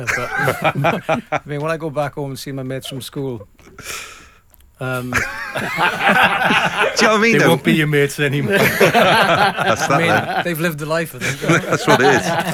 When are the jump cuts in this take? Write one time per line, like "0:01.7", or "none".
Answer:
none